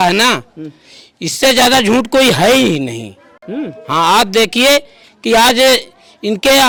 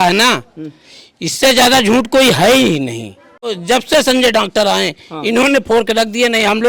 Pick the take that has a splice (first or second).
second